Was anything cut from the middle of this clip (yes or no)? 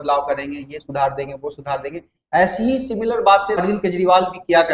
yes